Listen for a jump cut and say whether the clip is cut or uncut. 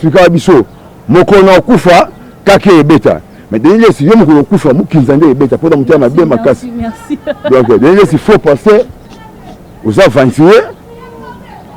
uncut